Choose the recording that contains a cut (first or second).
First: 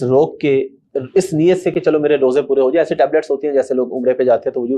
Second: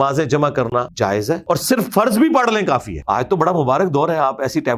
second